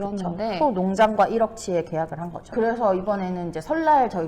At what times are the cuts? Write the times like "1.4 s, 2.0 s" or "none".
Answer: 2.4 s